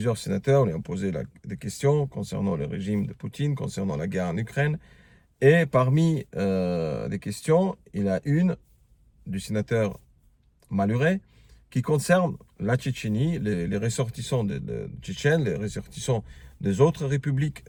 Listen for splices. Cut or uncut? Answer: uncut